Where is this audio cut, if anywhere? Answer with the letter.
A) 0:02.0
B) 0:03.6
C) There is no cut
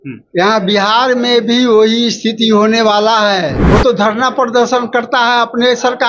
B